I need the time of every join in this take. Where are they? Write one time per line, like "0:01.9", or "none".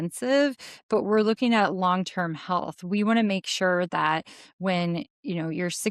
none